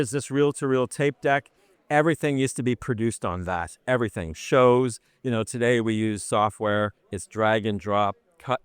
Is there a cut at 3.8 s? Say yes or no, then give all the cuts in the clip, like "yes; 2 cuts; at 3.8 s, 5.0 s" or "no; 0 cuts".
no; 1 cut; at 1.7 s